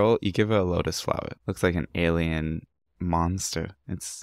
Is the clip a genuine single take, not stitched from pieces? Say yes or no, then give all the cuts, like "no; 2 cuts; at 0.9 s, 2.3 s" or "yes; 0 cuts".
no; 1 cut; at 1.3 s